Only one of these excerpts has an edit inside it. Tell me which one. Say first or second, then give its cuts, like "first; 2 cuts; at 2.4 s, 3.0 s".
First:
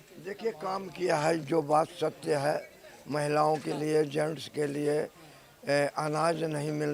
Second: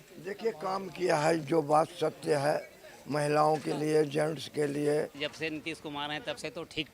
second; 1 cut; at 5.2 s